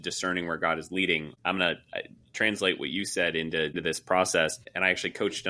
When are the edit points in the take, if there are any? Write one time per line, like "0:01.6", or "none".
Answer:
0:01.3
0:03.8
0:04.6